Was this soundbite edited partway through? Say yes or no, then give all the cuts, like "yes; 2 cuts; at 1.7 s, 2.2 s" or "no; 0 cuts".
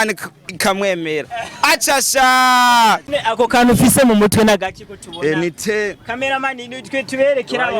yes; 1 cut; at 3.1 s